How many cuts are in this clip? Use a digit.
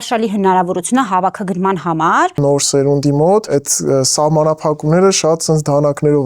2